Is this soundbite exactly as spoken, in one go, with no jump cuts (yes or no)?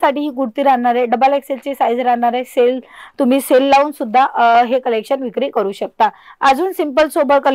yes